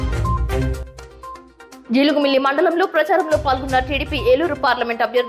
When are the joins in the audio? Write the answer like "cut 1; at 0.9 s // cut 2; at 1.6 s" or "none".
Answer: none